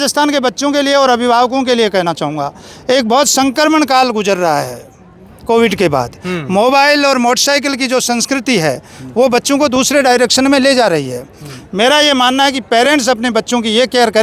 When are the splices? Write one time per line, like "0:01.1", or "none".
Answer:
none